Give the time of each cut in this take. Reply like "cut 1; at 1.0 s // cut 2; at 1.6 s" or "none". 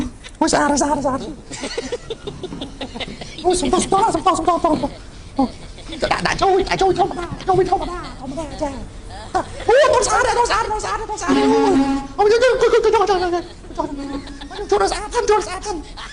none